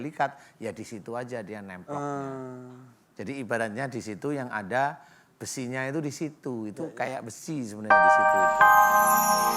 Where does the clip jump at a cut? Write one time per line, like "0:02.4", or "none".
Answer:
0:07.8

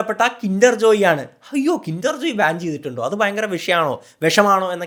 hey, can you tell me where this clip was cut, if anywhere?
none

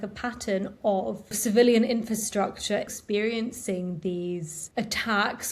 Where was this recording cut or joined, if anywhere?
0:01.4
0:02.9
0:04.6

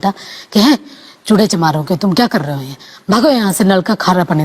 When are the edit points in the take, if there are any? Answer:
none

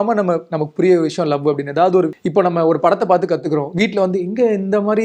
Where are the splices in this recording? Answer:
0:02.2

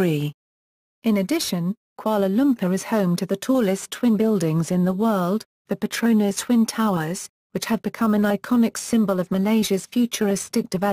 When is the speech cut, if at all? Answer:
none

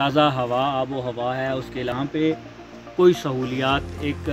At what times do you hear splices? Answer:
0:01.9

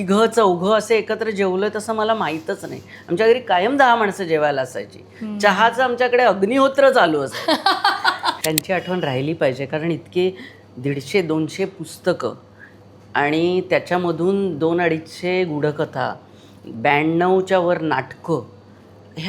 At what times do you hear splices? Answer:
0:08.4

